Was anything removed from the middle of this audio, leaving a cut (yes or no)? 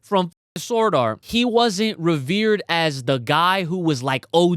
yes